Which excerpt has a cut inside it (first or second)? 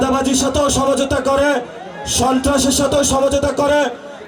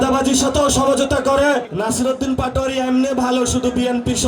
second